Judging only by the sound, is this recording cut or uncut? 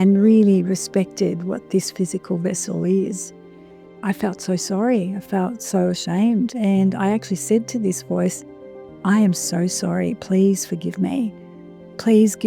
cut